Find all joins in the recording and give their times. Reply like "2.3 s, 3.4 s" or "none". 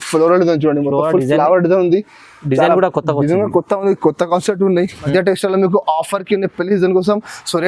5.1 s